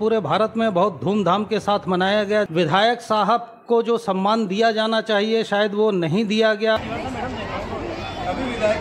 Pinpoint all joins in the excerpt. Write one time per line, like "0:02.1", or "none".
0:02.5
0:06.8

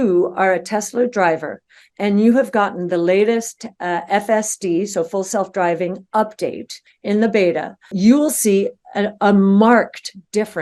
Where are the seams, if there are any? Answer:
0:07.9

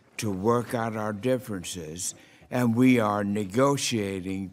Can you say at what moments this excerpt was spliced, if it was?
0:02.2

